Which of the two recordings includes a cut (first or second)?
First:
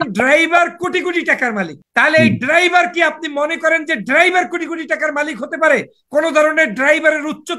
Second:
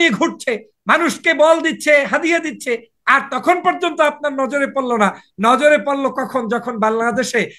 first